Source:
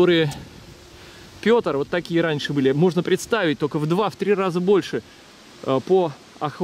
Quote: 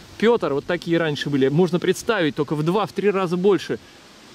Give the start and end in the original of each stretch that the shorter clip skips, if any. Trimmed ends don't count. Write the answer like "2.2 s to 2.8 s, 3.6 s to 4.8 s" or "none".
none